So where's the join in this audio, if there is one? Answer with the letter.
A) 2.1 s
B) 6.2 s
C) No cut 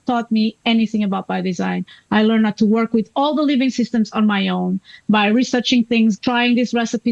B